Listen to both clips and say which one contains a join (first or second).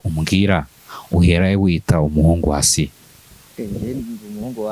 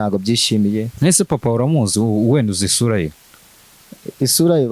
second